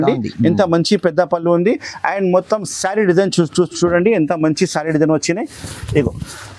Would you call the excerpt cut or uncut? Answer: uncut